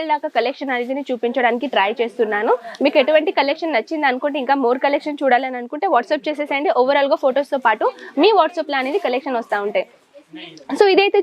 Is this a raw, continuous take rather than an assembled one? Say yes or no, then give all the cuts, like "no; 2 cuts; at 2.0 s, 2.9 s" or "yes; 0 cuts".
yes; 0 cuts